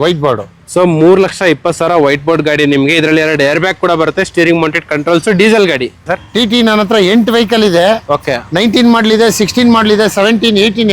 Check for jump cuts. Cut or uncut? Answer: cut